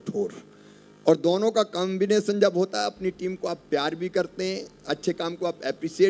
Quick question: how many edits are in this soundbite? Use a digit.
0